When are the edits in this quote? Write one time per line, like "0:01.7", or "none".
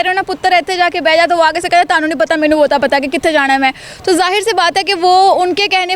none